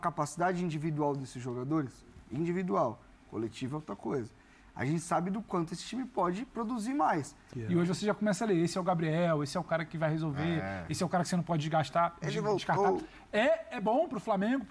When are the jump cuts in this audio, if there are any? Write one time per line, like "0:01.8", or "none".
0:07.5

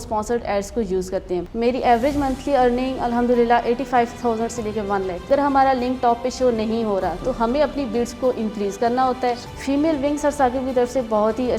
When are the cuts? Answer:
0:01.5
0:05.2
0:09.5

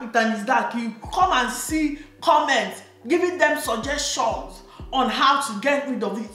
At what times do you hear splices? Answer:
none

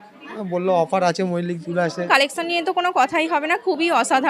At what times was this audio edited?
0:02.1

